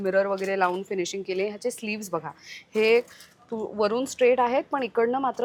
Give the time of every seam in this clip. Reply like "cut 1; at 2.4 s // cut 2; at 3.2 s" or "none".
none